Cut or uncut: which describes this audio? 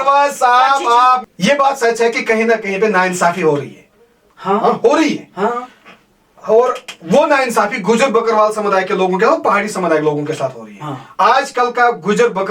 cut